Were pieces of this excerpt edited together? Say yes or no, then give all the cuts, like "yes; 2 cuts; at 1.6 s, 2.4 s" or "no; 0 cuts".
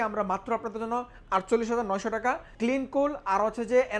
yes; 1 cut; at 2.5 s